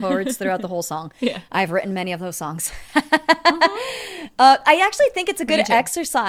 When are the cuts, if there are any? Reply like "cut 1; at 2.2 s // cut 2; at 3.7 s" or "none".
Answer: none